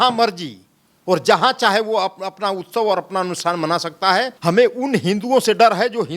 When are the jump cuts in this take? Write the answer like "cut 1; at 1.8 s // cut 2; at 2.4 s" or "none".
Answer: cut 1; at 4.3 s